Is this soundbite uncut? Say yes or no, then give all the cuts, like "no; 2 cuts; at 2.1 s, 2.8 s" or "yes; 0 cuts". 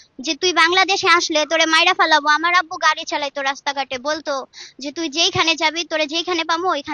yes; 0 cuts